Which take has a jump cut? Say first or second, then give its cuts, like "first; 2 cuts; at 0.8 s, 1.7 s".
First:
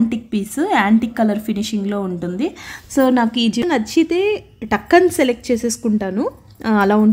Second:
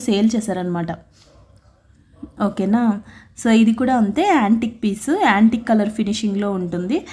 first; 1 cut; at 3.6 s